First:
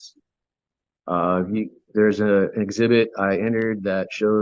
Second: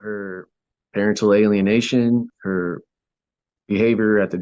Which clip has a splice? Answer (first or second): second